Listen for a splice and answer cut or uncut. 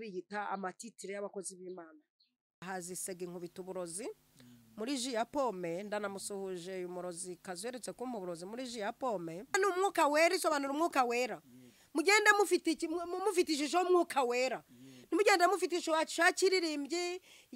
cut